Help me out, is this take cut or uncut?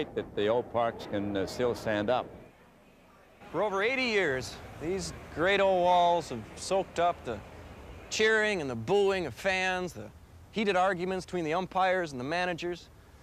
uncut